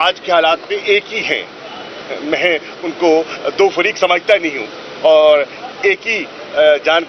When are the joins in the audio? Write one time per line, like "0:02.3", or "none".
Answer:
none

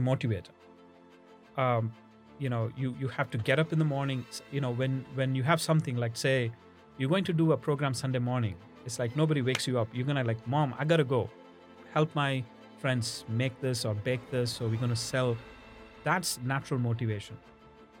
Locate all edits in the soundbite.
0:01.0

